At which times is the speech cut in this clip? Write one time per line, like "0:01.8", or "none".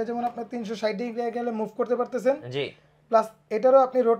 none

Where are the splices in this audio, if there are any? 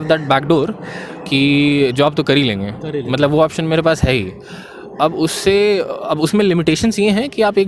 none

